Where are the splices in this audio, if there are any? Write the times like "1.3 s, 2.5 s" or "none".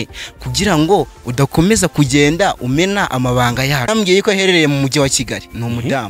3.9 s